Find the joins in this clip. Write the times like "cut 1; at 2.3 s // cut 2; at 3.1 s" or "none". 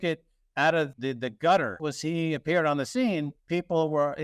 cut 1; at 0.9 s // cut 2; at 1.8 s